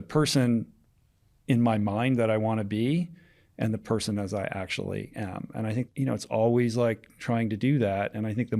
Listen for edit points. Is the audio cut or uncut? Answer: cut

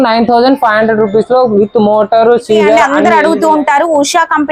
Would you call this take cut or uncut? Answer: cut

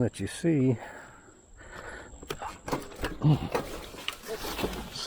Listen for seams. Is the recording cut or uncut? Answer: uncut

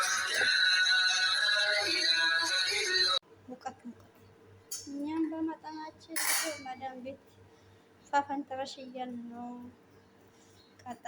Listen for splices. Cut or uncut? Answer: cut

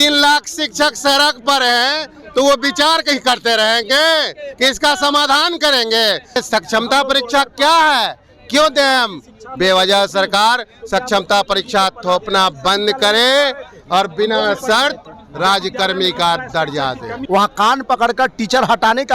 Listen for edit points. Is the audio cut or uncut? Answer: cut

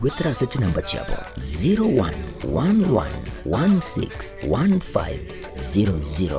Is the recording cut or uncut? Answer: uncut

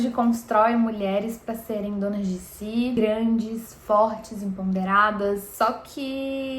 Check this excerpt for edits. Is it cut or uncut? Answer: cut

